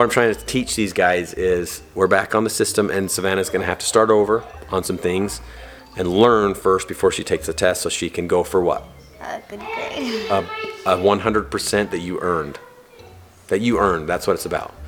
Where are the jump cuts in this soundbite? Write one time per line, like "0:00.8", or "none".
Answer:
none